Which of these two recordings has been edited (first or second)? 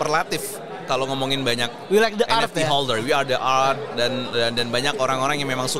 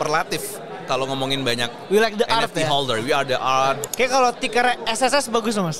second